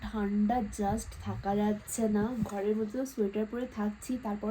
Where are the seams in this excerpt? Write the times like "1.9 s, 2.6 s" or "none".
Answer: none